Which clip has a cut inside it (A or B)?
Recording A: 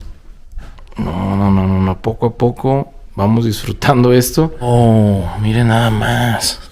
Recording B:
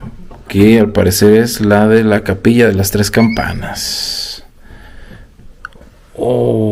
A